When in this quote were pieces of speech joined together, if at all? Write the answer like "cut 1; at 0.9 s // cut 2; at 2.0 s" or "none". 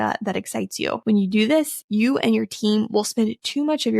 cut 1; at 1.0 s // cut 2; at 1.8 s